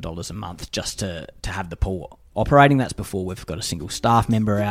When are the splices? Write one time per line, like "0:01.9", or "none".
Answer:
none

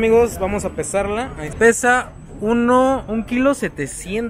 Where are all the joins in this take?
0:01.5

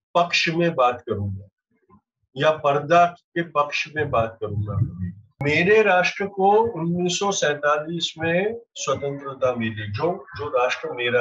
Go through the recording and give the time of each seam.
0:05.4

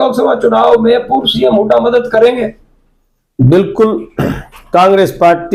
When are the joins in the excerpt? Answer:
none

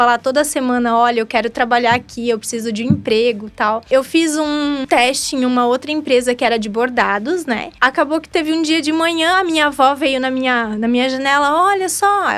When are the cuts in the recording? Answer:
0:03.9
0:04.8
0:07.7

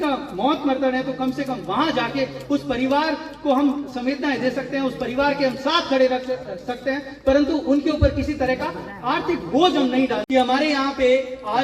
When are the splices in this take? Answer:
0:10.2

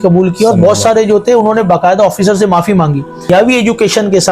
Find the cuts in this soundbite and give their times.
0:03.3

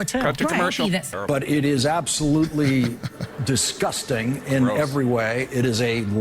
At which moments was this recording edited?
0:01.1

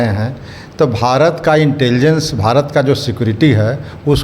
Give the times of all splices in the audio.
none

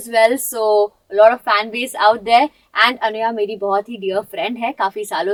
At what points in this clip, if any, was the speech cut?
none

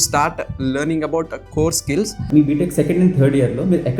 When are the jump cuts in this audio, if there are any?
0:02.2

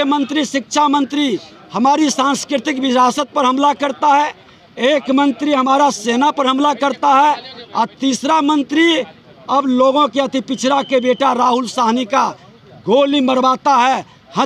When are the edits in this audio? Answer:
none

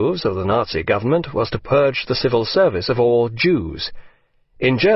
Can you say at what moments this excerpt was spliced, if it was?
0:02.5

